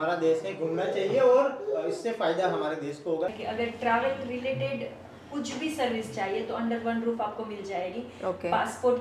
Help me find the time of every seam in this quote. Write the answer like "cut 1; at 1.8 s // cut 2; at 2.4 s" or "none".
cut 1; at 3.4 s